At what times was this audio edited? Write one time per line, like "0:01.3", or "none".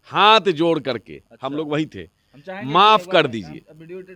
none